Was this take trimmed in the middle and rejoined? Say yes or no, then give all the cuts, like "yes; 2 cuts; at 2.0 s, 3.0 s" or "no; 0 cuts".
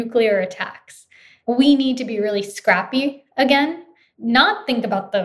yes; 2 cuts; at 1.3 s, 4.0 s